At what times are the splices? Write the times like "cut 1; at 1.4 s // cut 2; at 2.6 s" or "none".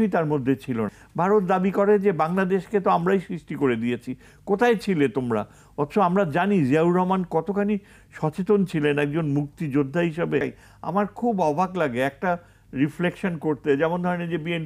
cut 1; at 1.0 s // cut 2; at 10.4 s

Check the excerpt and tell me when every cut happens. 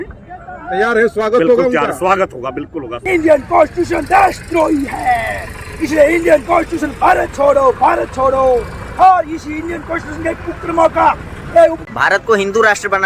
cut 1; at 2.9 s // cut 2; at 11.8 s

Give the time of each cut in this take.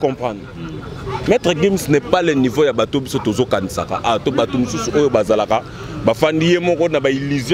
none

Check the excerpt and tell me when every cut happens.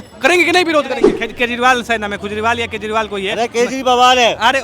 cut 1; at 1.1 s

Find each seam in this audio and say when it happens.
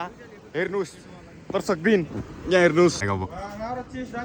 cut 1; at 3.0 s

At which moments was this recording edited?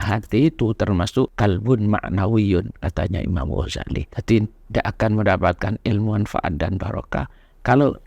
cut 1; at 1.3 s // cut 2; at 4.1 s

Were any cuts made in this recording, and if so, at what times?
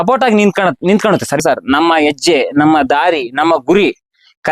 cut 1; at 1.4 s

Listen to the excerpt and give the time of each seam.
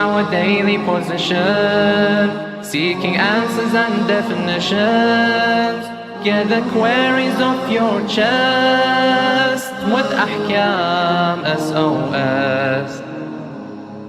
none

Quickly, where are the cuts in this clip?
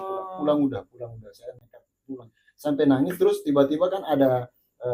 none

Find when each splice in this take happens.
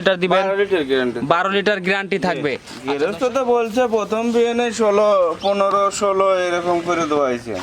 cut 1; at 2.7 s

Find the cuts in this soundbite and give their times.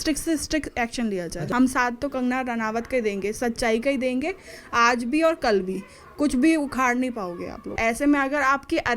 cut 1; at 1.4 s // cut 2; at 7.7 s

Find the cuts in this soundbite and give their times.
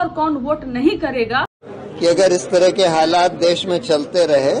cut 1; at 1.6 s

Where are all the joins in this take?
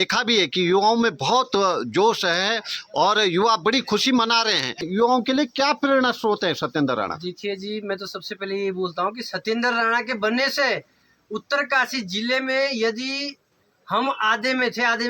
cut 1; at 4.9 s

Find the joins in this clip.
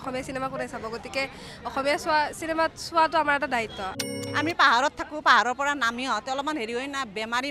cut 1; at 3.9 s

